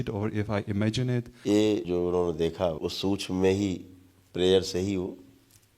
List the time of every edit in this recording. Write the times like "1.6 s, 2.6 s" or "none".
1.3 s, 1.8 s, 2.8 s